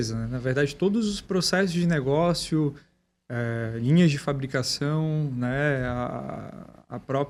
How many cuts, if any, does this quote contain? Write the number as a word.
zero